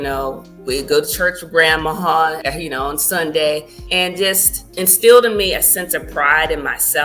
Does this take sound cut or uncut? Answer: cut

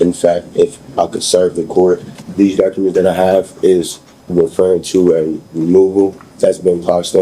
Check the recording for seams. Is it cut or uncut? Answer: cut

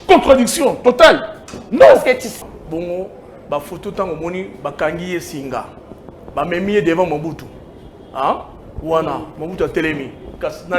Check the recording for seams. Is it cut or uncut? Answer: cut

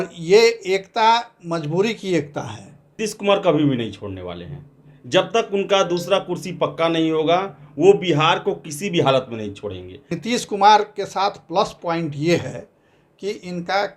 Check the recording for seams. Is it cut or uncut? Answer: cut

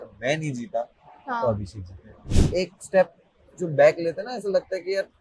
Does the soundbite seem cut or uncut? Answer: cut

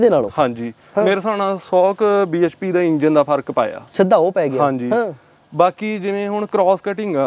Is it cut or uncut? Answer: uncut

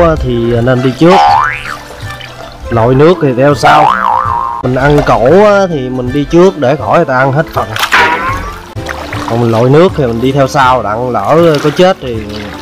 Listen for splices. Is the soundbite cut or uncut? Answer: cut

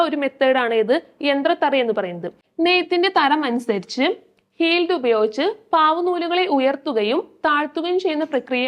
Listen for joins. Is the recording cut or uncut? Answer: cut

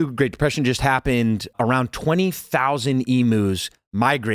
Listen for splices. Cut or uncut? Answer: cut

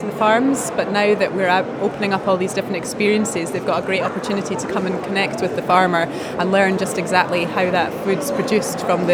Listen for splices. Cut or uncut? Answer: uncut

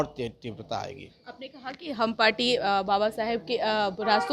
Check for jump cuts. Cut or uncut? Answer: uncut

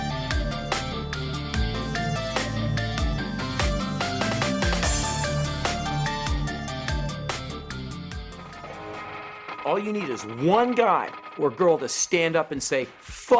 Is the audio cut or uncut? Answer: uncut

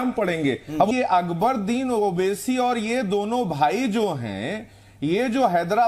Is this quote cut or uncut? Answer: cut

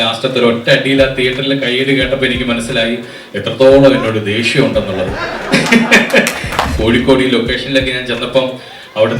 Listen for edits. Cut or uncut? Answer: cut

